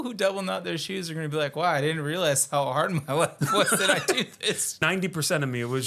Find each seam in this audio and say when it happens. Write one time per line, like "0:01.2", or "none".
0:04.8